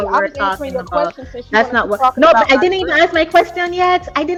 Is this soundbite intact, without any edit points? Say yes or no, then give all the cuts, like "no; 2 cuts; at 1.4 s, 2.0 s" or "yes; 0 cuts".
yes; 0 cuts